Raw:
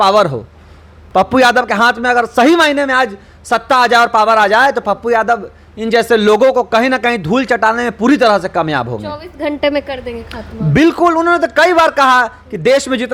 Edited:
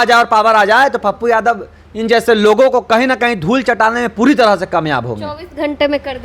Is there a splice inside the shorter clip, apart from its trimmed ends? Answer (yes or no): no